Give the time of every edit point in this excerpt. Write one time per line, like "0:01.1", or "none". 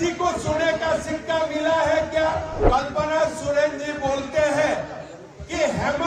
0:02.6